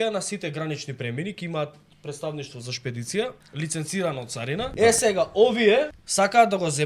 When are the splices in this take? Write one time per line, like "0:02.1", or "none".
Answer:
0:03.4
0:04.7
0:06.0